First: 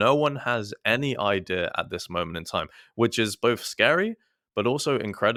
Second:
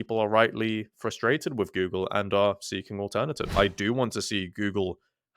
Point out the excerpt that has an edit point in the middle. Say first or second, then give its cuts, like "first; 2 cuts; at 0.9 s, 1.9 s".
second; 1 cut; at 3.5 s